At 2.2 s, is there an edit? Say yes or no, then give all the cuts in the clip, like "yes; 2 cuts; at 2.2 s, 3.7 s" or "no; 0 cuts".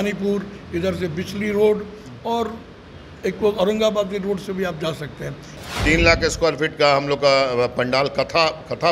no; 1 cut; at 5.6 s